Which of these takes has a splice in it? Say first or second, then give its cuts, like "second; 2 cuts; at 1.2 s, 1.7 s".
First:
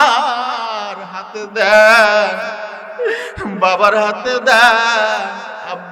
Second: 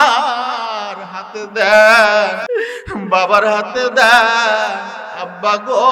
second; 1 cut; at 2.4 s